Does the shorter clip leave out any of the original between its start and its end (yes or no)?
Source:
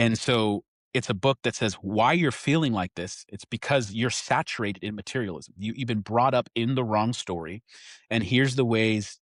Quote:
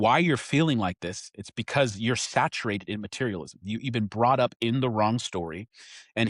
no